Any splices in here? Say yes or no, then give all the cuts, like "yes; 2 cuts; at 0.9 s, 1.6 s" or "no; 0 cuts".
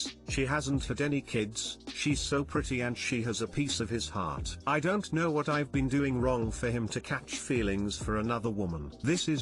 no; 0 cuts